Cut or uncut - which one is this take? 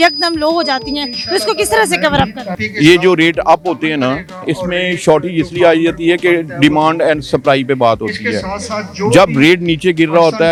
uncut